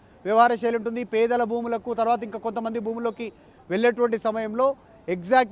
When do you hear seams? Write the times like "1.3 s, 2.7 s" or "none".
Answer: none